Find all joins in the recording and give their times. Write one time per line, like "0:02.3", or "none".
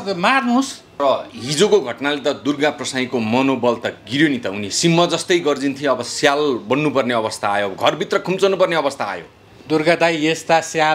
0:01.0